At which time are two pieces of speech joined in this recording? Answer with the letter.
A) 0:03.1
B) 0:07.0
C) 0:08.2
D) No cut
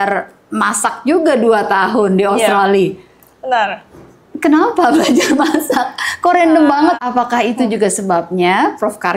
B